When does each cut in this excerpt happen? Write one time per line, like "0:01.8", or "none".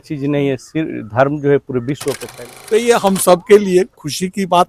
0:02.2

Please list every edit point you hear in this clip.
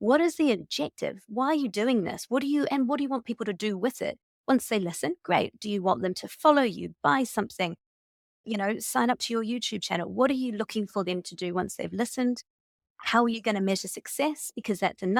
none

